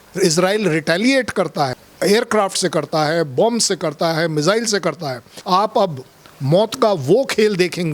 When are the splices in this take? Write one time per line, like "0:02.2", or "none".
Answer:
0:01.8
0:05.3